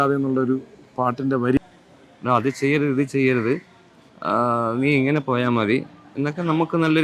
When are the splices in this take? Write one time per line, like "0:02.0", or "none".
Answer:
0:01.6